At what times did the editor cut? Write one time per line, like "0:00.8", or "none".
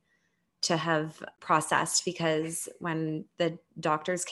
0:01.3